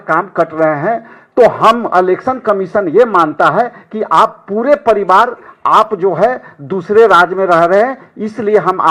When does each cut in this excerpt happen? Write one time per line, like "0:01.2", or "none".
none